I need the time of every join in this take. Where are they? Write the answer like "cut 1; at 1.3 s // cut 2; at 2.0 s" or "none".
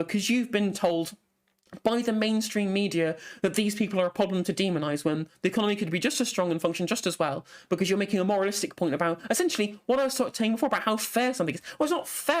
none